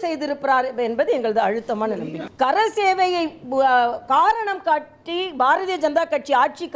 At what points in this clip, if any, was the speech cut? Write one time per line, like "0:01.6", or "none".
0:02.2